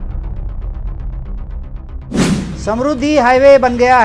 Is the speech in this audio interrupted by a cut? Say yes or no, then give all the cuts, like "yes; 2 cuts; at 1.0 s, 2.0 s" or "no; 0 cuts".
no; 0 cuts